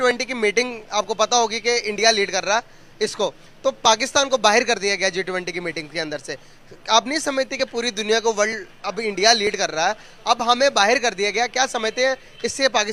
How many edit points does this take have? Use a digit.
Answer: 0